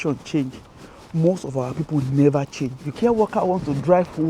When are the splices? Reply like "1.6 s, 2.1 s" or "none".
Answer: 2.9 s